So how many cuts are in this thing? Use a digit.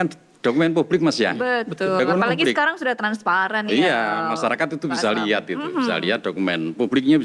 0